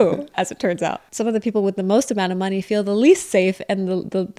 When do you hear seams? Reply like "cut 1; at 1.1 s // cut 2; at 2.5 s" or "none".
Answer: cut 1; at 1.1 s